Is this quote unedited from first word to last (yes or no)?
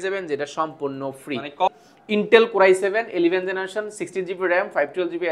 no